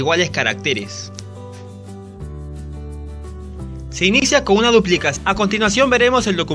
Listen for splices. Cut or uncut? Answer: uncut